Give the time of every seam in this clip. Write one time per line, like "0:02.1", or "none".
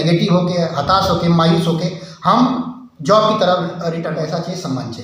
0:04.0